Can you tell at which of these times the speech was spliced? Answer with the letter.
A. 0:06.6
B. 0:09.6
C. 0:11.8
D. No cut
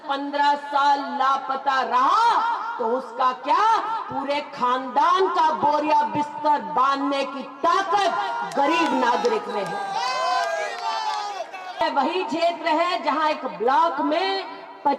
C